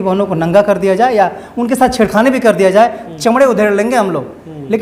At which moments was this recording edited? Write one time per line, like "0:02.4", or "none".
none